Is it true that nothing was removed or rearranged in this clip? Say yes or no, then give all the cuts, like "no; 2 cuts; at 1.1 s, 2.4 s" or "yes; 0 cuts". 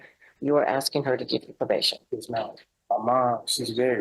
no; 1 cut; at 2.7 s